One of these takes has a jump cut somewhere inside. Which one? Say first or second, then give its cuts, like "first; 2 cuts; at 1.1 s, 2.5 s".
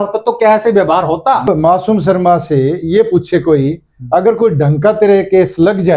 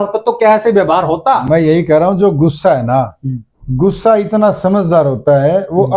first; 1 cut; at 1.4 s